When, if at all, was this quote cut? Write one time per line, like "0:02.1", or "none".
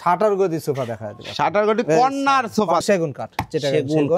0:02.8